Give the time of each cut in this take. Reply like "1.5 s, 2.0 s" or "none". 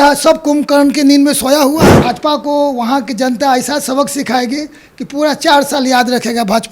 2.0 s